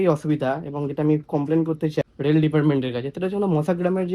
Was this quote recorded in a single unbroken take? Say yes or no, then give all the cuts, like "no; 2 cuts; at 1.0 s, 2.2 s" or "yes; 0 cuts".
no; 1 cut; at 2.0 s